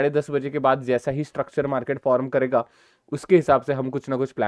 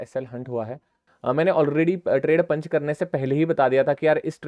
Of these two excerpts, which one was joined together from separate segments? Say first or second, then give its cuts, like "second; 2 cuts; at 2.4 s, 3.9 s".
second; 1 cut; at 1.1 s